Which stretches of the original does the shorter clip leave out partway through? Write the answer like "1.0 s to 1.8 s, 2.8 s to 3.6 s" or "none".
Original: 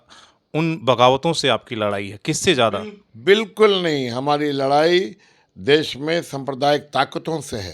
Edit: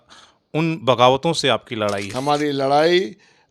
2.1 s to 4.1 s